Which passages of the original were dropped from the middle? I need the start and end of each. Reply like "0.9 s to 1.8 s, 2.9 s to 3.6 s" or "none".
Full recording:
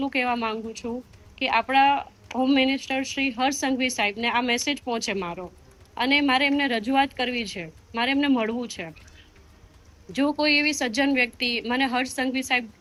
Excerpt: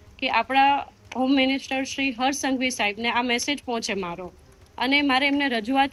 none